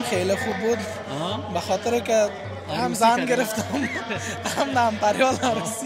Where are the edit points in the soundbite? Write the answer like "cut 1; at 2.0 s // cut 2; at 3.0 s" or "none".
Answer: none